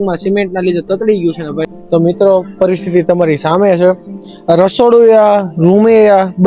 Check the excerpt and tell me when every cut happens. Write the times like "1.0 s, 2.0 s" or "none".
1.8 s